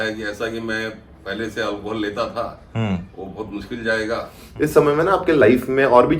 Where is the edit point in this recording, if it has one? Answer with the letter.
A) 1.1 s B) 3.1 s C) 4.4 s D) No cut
C